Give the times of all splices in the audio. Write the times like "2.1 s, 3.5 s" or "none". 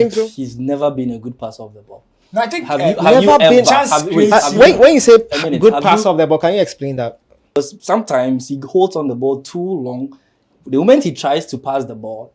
7.6 s